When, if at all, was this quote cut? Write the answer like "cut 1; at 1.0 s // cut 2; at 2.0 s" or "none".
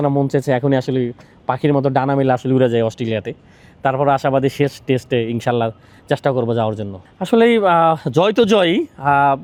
none